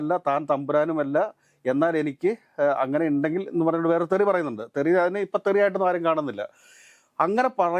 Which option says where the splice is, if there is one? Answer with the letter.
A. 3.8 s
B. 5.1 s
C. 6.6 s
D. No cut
D